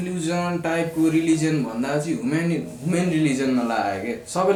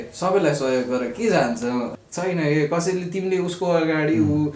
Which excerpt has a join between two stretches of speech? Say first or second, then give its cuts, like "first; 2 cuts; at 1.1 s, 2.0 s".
second; 1 cut; at 1.9 s